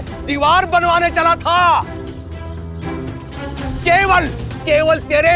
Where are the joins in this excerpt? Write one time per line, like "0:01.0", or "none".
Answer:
0:03.8